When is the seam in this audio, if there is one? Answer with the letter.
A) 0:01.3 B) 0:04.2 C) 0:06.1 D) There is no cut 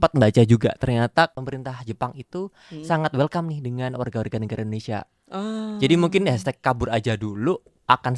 A